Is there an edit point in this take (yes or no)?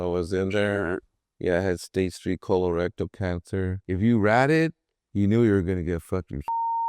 yes